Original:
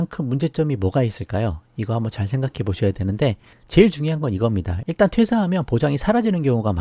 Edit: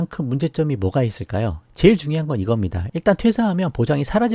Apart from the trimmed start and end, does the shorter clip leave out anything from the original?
yes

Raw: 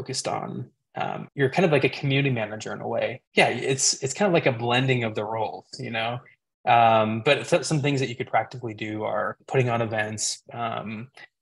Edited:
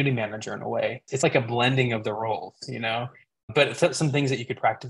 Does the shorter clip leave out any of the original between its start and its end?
yes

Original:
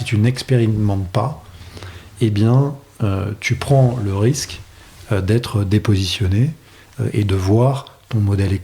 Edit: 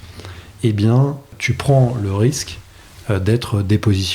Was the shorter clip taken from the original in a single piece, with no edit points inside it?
no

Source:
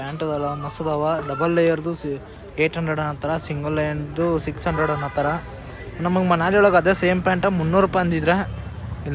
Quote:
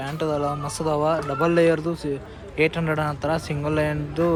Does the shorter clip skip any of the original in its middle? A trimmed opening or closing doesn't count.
no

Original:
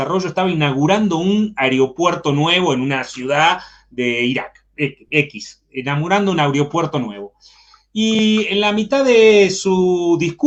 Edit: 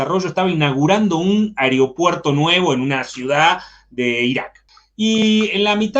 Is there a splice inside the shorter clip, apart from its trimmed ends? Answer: yes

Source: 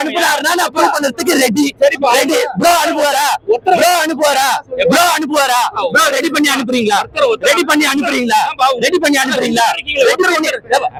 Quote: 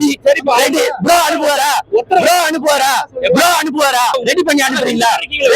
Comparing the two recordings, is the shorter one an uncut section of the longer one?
no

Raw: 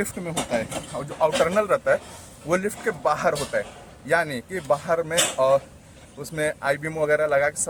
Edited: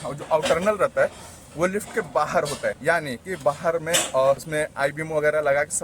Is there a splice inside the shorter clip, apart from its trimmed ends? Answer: yes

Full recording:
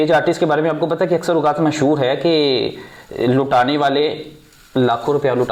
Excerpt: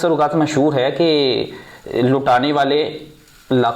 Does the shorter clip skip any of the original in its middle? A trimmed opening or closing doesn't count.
no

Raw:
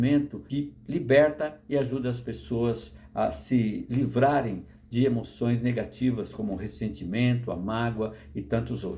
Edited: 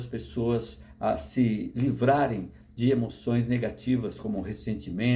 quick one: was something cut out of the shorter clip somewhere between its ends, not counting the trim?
no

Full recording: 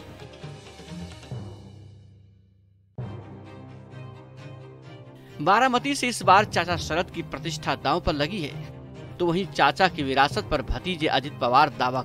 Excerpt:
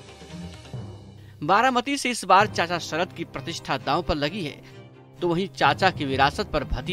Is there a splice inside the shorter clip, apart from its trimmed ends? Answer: yes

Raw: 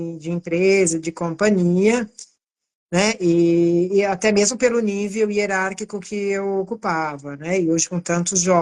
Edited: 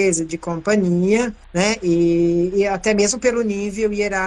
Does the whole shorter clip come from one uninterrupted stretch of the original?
no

